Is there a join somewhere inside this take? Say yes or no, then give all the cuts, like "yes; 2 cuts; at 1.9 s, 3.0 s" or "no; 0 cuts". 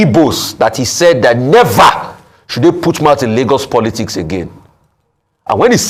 no; 0 cuts